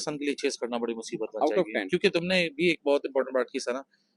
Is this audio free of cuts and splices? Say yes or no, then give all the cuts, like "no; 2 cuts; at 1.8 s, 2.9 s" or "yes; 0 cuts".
yes; 0 cuts